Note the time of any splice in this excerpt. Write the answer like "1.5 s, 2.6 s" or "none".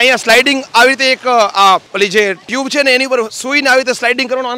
none